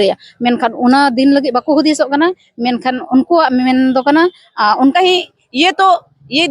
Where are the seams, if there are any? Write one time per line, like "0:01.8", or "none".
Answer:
0:04.9